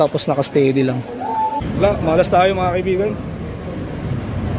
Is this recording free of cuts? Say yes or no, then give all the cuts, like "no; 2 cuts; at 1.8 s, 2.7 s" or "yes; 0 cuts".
no; 1 cut; at 1.6 s